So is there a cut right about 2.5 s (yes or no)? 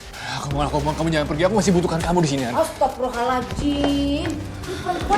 yes